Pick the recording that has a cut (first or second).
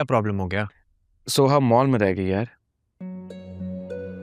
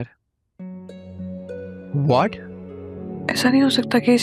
second